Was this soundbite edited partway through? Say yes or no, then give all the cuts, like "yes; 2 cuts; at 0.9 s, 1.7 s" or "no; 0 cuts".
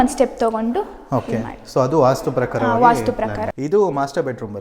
yes; 1 cut; at 3.5 s